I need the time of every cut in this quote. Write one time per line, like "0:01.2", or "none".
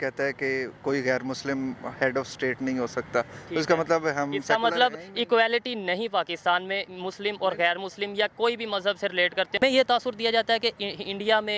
0:09.6